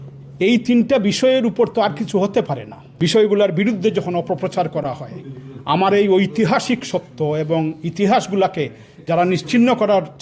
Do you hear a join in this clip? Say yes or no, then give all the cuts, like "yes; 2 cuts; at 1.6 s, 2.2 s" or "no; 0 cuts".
yes; 1 cut; at 2.9 s